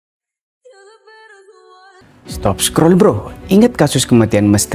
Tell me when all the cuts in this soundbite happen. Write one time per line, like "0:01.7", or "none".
0:02.0